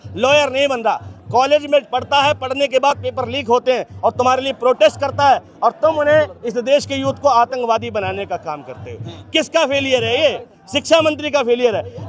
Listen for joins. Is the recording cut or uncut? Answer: uncut